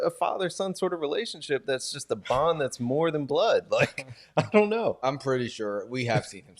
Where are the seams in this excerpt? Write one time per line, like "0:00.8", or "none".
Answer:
0:05.0